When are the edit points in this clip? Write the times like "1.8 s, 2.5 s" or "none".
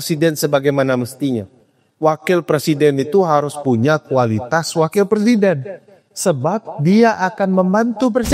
none